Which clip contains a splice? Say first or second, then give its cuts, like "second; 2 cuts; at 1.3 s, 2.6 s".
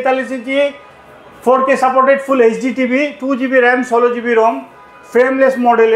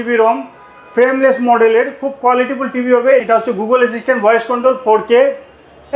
second; 1 cut; at 3.2 s